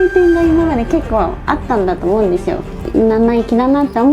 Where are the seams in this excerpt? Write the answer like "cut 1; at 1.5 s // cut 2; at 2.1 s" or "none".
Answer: cut 1; at 2.9 s